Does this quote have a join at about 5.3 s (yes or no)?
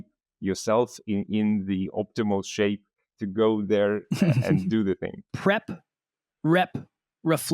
yes